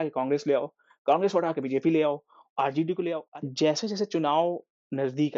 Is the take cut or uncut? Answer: cut